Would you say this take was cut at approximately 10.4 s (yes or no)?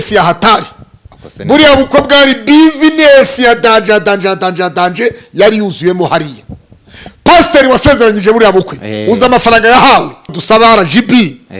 yes